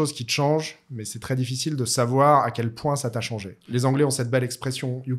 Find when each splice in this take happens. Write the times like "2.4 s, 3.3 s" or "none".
3.5 s